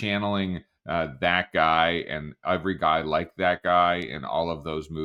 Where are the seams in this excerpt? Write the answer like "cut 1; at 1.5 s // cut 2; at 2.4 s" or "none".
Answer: none